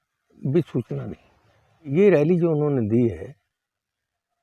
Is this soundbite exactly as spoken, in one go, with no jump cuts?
no; 1 cut; at 1.9 s

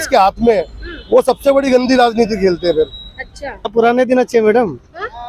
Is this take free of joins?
no; 1 cut; at 3.7 s

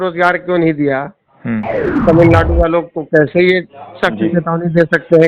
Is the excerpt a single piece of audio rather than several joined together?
no; 1 cut; at 2.0 s

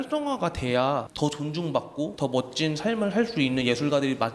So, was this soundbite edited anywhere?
yes; 2 cuts; at 1.1 s, 2.1 s

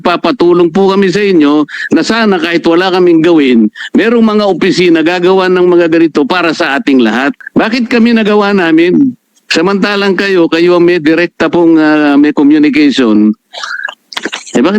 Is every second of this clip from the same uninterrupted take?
no; 1 cut; at 7.4 s

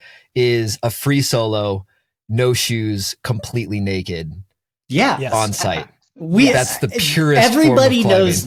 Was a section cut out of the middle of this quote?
no; 0 cuts

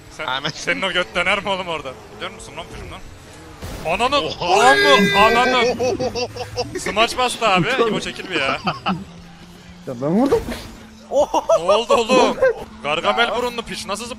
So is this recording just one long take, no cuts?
no; 4 cuts; at 2.1 s, 6.7 s, 9.0 s, 12.7 s

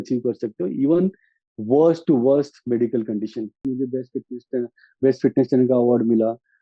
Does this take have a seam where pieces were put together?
yes; 1 cut; at 3.6 s

